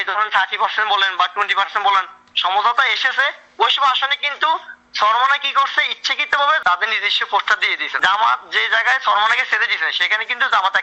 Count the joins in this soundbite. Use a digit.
2